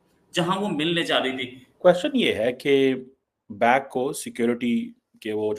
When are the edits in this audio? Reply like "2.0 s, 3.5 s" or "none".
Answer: 1.8 s